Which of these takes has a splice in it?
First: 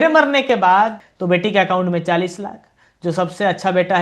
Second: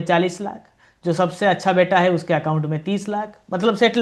first; 1 cut; at 1.1 s

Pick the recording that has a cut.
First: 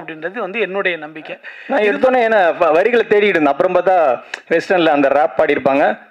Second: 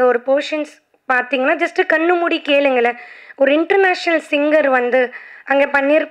first; 1 cut; at 1.5 s

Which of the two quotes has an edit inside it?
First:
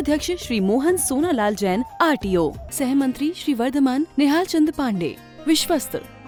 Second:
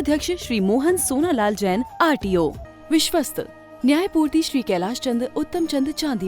second; 1 cut; at 2.7 s

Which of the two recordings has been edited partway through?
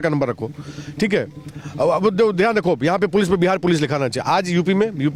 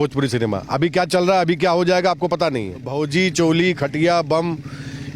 second; 1 cut; at 2.8 s

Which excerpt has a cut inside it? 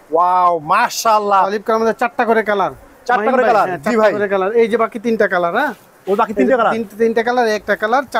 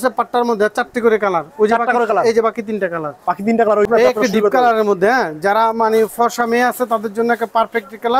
second; 1 cut; at 3.9 s

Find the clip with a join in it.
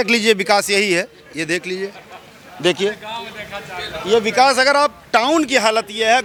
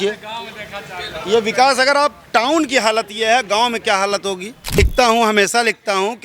second; 1 cut; at 4.8 s

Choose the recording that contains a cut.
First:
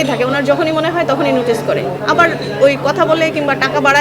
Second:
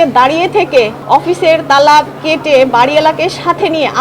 second; 1 cut; at 1.0 s

